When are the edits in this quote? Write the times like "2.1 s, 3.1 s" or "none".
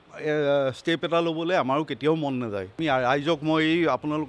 2.8 s